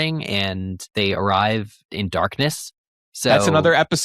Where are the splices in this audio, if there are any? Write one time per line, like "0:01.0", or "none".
0:00.9
0:01.9